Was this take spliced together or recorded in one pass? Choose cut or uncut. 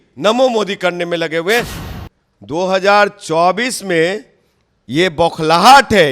cut